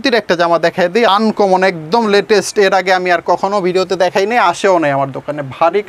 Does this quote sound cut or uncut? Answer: cut